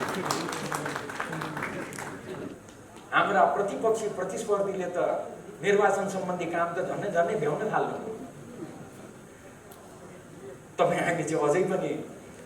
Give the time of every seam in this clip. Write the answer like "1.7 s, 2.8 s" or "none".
2.6 s